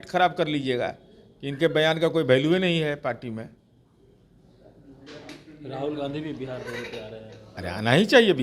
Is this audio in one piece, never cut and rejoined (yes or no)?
yes